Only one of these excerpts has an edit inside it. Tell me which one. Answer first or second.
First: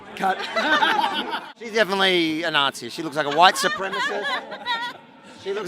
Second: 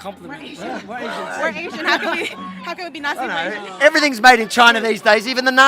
first